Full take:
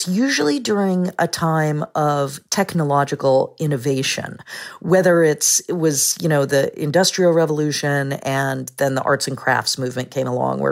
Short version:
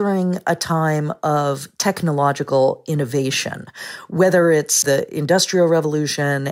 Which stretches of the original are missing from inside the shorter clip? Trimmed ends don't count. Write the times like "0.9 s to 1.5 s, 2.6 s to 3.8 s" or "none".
5.6 s to 6.5 s